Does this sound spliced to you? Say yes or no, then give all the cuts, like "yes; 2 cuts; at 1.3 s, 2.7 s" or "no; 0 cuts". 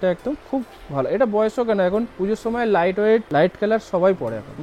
yes; 2 cuts; at 2.1 s, 3.3 s